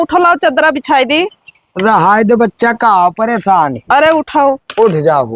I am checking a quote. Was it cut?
no; 0 cuts

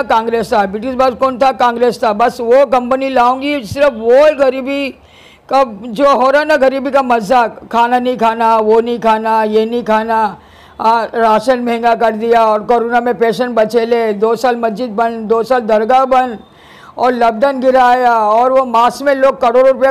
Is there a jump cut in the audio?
no; 0 cuts

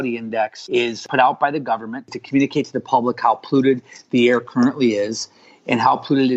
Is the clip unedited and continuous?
no; 2 cuts; at 1.0 s, 2.2 s

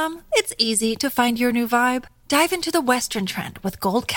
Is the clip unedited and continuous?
yes; 0 cuts

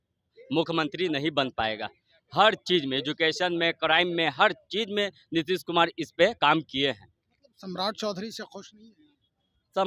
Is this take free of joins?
yes; 0 cuts

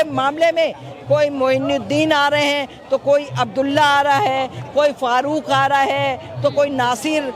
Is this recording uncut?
yes; 0 cuts

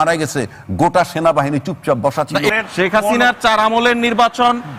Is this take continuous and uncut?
no; 1 cut; at 2.5 s

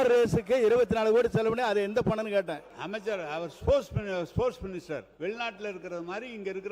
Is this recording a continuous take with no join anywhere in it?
no; 2 cuts; at 2.7 s, 5.1 s

